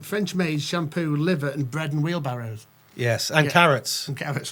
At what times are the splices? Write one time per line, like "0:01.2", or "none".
none

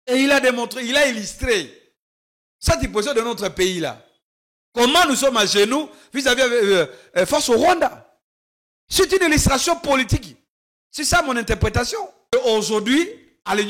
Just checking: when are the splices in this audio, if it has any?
0:12.3

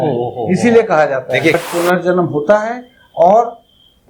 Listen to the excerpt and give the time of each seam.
0:01.6

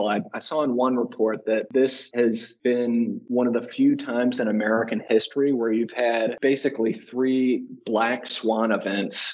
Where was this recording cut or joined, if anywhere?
0:02.1
0:03.2
0:06.4

